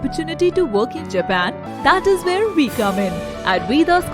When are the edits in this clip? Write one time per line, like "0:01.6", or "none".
0:01.7